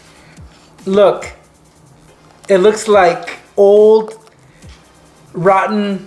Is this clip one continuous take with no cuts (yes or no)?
yes